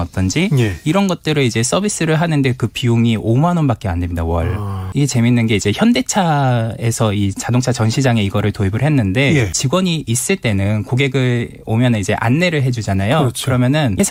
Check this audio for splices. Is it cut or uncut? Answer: uncut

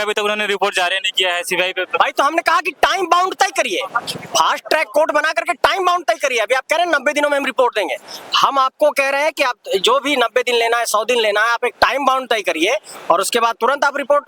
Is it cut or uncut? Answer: uncut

